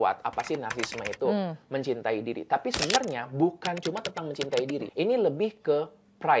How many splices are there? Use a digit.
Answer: 1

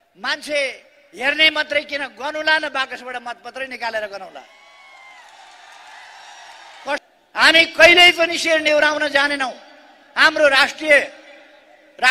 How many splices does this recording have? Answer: 1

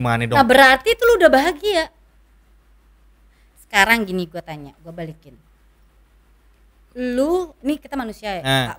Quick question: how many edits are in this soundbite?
0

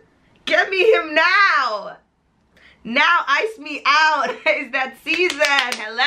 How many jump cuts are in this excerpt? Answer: 0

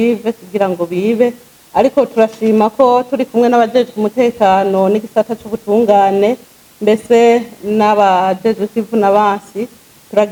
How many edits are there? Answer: 0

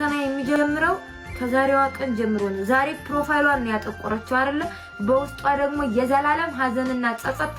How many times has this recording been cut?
0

